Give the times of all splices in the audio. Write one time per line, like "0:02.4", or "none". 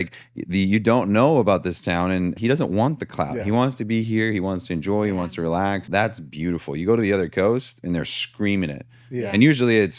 0:02.4
0:05.9